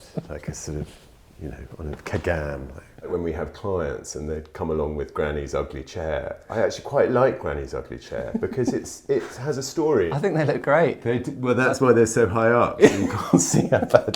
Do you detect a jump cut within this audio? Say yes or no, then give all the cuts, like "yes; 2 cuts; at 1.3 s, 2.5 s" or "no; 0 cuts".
yes; 2 cuts; at 3.1 s, 10.1 s